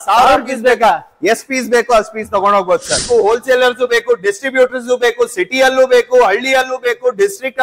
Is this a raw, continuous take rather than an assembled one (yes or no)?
no